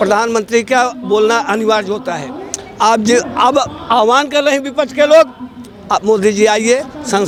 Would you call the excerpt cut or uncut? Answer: uncut